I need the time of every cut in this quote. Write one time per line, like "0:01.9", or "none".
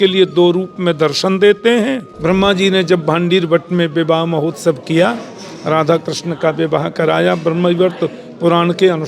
0:02.1